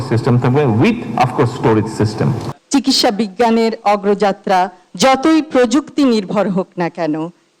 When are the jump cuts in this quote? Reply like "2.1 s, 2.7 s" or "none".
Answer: 2.5 s